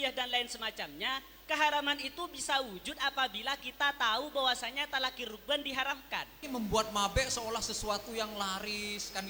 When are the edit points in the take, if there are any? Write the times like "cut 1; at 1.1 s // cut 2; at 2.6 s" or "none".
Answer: cut 1; at 6.4 s

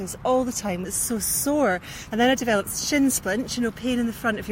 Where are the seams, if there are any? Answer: cut 1; at 0.8 s // cut 2; at 1.9 s

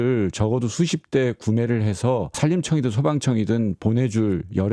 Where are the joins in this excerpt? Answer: cut 1; at 2.4 s

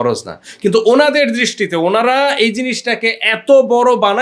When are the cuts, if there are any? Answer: none

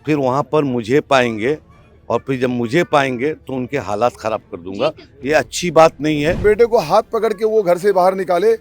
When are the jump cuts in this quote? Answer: cut 1; at 6.4 s

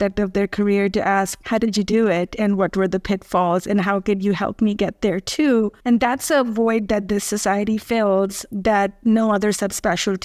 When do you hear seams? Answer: cut 1; at 1.4 s // cut 2; at 5.8 s

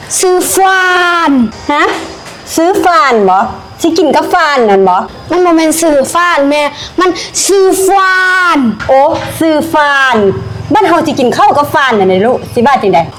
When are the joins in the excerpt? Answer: none

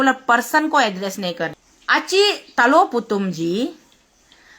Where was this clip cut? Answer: cut 1; at 1.5 s

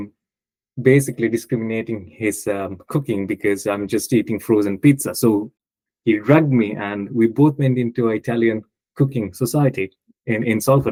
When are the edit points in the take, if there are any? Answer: none

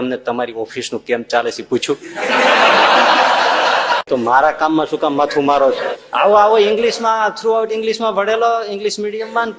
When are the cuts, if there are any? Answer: cut 1; at 4.0 s // cut 2; at 5.9 s

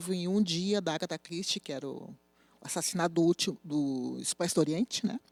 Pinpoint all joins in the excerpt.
none

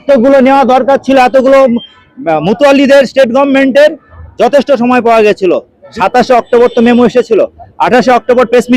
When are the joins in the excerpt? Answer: cut 1; at 5.8 s

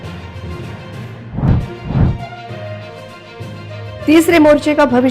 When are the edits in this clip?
cut 1; at 1.2 s

